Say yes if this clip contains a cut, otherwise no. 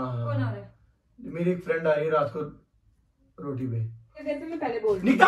yes